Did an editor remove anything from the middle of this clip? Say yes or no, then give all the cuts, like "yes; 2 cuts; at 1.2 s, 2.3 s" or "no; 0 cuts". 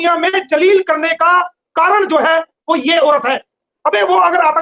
yes; 1 cut; at 3.7 s